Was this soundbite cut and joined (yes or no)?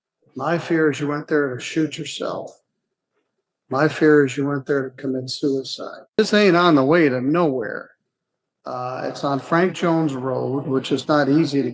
yes